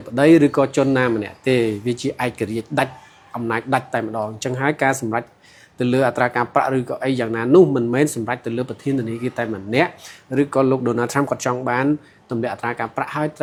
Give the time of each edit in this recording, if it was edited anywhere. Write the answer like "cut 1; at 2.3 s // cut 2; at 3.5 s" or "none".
none